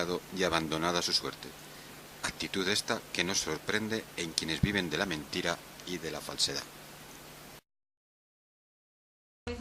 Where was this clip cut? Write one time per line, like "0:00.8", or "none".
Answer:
none